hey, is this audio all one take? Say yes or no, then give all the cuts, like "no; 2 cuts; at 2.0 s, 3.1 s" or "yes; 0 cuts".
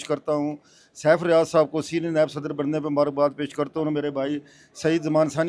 yes; 0 cuts